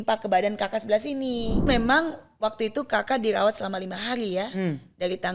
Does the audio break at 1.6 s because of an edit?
yes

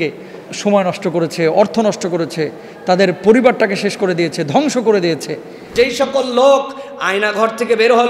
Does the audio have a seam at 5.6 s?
yes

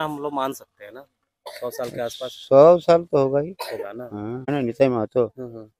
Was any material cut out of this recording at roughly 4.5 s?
yes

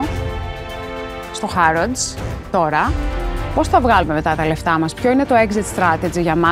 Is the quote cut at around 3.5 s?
yes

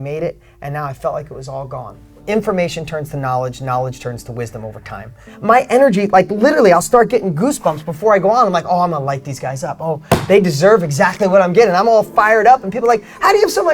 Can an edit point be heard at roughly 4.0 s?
no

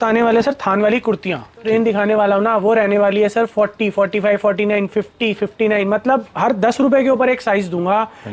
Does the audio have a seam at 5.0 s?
no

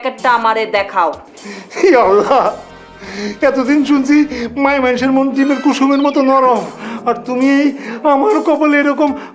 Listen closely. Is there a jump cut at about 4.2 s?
no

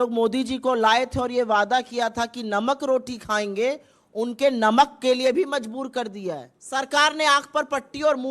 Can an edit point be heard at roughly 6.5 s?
yes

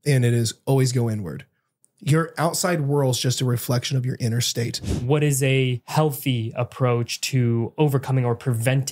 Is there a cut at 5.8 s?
yes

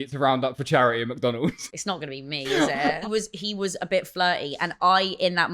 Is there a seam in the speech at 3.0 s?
yes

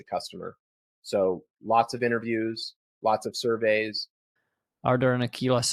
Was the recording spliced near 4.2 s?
yes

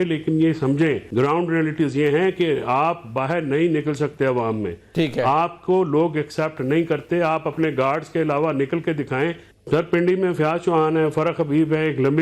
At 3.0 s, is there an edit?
no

